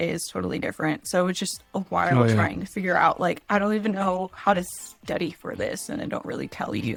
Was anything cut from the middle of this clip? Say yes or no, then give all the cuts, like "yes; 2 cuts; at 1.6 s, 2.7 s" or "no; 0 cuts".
no; 0 cuts